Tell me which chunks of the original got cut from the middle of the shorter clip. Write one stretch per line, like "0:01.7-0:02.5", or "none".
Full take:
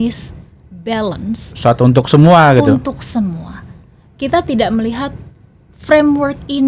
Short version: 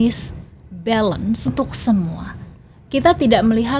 0:01.6-0:02.8

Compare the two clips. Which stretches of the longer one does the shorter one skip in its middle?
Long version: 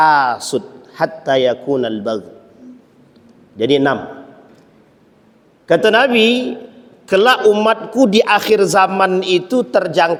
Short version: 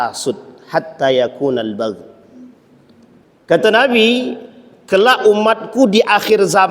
0:03.5-0:05.4

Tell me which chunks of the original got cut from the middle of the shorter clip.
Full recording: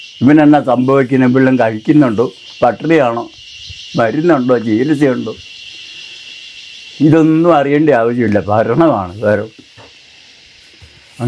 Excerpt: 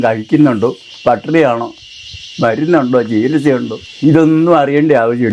0:05.4-0:06.8

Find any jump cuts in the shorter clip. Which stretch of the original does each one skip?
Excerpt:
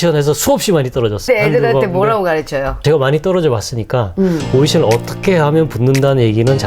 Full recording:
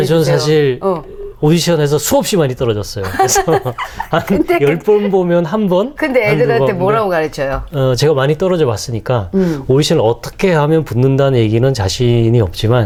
0:02.9-0:06.1
0:07.7-0:08.0

